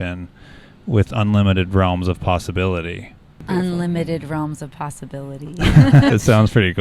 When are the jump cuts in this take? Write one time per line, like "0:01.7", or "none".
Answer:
0:03.3
0:06.1